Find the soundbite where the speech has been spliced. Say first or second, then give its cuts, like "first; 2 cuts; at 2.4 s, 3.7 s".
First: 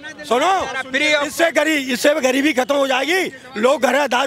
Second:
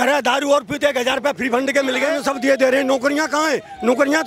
second; 1 cut; at 2.2 s